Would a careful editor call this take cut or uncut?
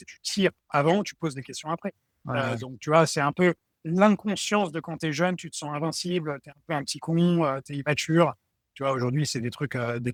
uncut